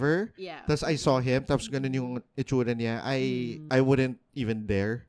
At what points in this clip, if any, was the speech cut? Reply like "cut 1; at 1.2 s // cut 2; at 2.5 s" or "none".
cut 1; at 3.6 s